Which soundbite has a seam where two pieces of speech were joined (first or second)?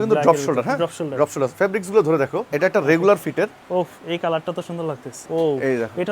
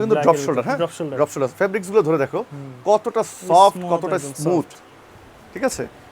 first